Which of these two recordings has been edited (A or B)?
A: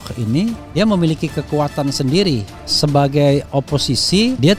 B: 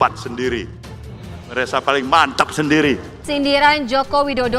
B